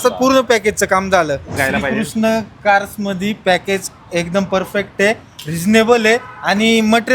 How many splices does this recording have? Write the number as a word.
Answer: one